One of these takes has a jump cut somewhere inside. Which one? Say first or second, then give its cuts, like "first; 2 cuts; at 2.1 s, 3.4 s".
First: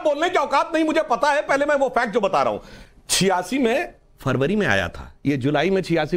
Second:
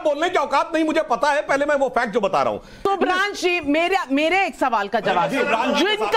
second; 1 cut; at 2.7 s